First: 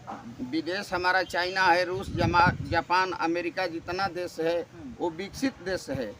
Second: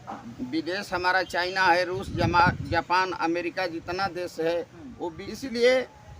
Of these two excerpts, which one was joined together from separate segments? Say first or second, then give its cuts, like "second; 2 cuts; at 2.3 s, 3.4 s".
second; 1 cut; at 5.3 s